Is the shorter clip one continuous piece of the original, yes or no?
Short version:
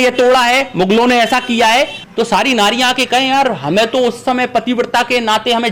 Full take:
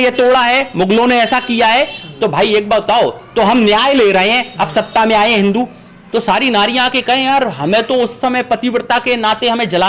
no